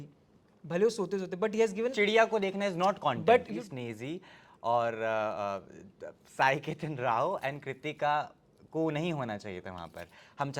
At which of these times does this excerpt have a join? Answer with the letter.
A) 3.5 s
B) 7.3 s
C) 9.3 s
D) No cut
A